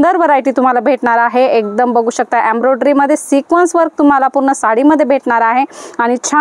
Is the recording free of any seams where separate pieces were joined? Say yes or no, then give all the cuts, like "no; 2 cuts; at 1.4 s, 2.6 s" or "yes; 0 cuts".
yes; 0 cuts